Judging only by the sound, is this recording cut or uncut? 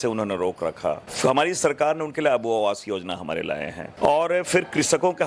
uncut